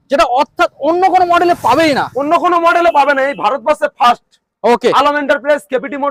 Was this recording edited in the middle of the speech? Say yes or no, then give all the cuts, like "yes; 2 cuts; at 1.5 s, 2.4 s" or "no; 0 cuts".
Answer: no; 0 cuts